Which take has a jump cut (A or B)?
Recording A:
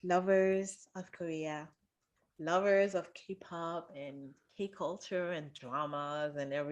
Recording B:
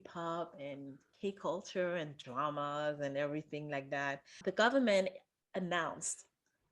B